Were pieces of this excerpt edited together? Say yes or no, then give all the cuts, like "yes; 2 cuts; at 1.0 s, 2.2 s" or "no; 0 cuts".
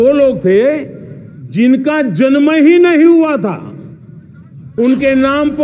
yes; 1 cut; at 4.6 s